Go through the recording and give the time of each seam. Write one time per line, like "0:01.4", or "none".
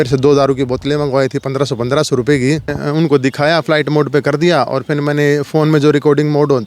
0:02.8